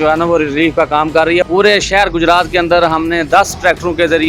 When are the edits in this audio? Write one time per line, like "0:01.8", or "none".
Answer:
0:01.4

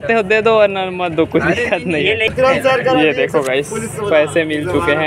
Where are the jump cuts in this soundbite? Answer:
0:02.3

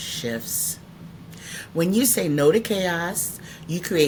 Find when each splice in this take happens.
none

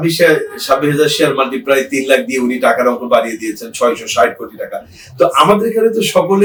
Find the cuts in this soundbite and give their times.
none

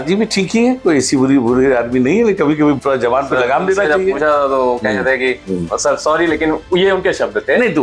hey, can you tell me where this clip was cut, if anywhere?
0:02.8

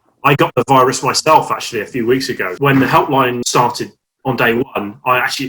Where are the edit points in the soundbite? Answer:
0:02.5
0:03.4

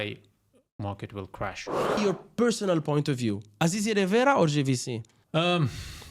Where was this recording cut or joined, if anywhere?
0:02.0
0:05.1

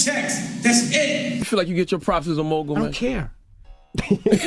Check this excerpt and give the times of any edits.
0:01.4

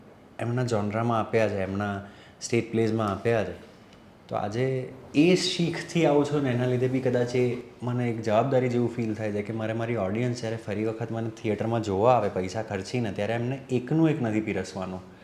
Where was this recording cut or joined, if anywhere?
none

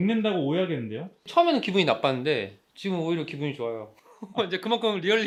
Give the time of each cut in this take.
none

